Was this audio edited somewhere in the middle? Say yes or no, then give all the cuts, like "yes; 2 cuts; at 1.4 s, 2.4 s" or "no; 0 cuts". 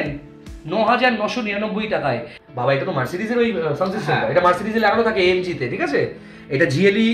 yes; 1 cut; at 2.3 s